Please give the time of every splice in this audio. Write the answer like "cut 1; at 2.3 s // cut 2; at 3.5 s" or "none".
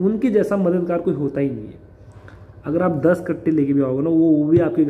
none